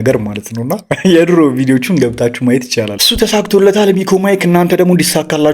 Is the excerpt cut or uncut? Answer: cut